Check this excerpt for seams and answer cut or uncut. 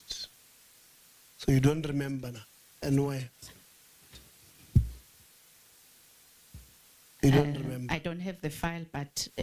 uncut